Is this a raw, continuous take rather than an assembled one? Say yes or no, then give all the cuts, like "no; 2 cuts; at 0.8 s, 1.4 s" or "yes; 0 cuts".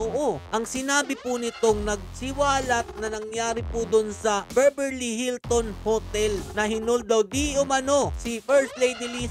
yes; 0 cuts